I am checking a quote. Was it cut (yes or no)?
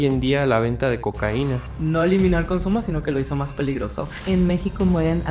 yes